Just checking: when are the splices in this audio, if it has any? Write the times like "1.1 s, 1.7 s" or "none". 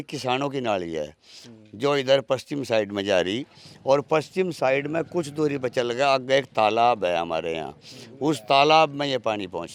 none